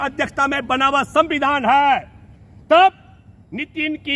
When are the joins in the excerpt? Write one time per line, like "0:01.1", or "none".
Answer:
none

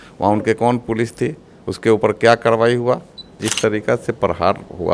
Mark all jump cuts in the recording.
0:03.5

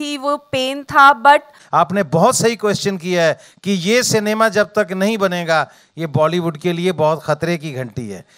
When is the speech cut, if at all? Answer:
0:01.6

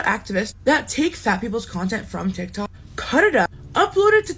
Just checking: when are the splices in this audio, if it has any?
0:03.3

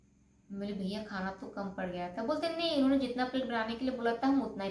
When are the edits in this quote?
none

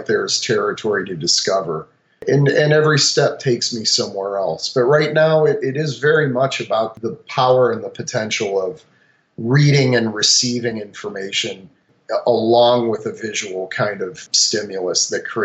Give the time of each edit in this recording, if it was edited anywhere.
0:14.2

